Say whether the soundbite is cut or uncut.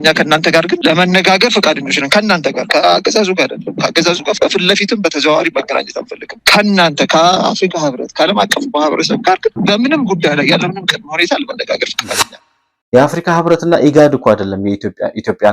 cut